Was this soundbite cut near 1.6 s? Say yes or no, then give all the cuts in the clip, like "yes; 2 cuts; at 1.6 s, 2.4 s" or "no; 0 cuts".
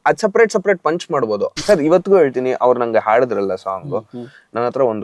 yes; 1 cut; at 1.6 s